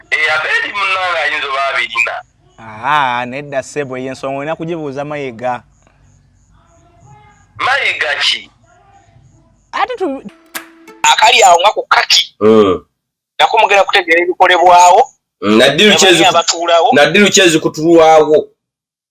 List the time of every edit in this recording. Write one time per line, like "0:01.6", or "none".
0:10.8